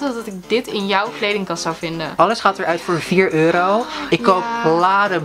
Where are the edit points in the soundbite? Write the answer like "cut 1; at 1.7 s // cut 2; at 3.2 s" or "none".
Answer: cut 1; at 2.0 s